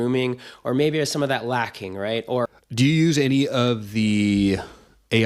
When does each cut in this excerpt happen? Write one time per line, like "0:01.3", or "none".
0:02.5

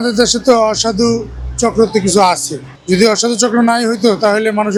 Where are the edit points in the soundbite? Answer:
none

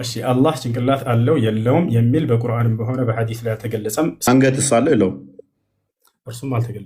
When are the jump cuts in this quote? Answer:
0:04.2

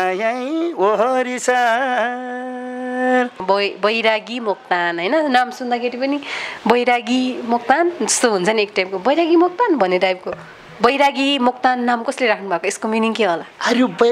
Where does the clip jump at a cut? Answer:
0:03.4

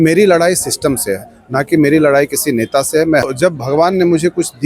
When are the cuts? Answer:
0:03.3

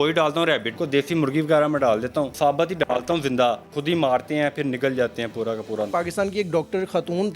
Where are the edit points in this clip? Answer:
0:00.8
0:02.3
0:03.7
0:05.9

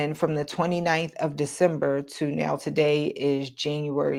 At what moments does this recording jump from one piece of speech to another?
none

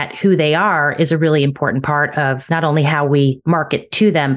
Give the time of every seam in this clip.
0:02.4
0:03.4

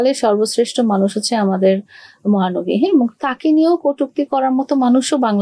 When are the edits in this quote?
none

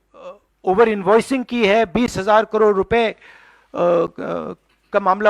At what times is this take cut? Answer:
none

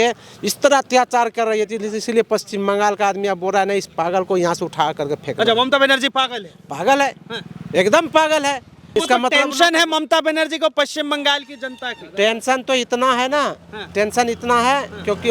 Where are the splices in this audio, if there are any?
0:08.8

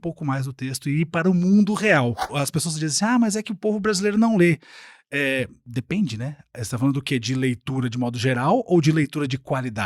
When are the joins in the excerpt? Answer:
0:02.3

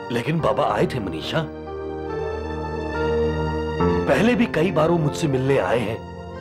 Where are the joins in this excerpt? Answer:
none

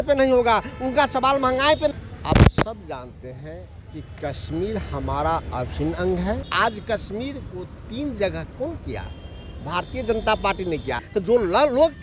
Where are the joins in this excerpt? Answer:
0:01.9
0:06.4
0:11.0

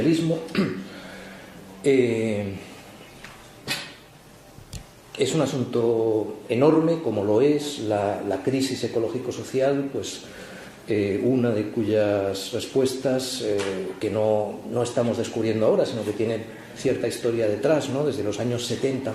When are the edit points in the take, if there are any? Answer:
none

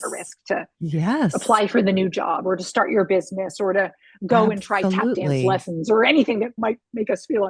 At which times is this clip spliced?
0:06.6

